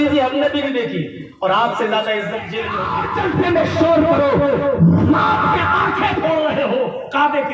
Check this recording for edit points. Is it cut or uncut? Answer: cut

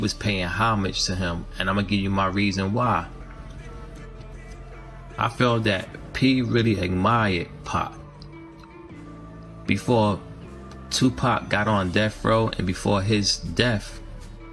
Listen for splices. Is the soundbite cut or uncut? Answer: cut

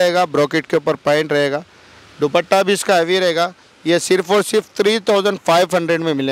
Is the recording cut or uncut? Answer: uncut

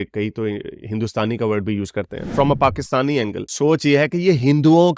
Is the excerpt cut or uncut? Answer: cut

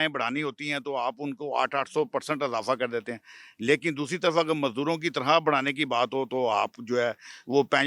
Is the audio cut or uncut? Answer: uncut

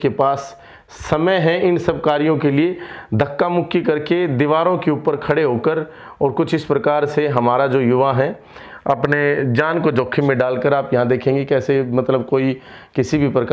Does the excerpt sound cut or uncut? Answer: uncut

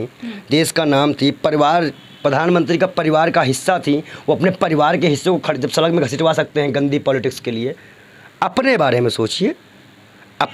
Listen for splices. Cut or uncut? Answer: uncut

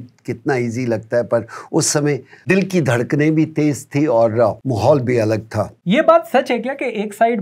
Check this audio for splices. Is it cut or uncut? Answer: cut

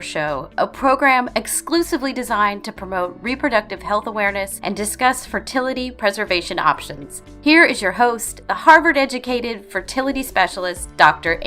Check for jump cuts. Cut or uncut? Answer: cut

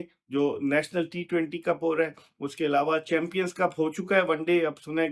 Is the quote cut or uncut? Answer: uncut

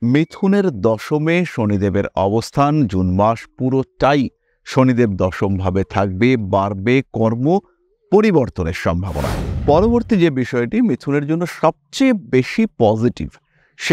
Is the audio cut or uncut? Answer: cut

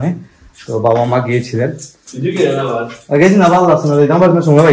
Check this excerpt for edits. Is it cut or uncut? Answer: uncut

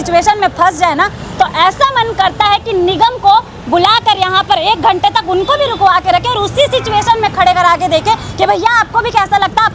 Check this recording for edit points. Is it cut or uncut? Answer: uncut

